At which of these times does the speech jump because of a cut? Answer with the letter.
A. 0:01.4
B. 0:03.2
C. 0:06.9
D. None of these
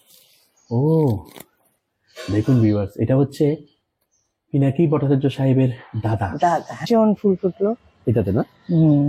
C